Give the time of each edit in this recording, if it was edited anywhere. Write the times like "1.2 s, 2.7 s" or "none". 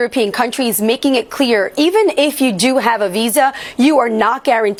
none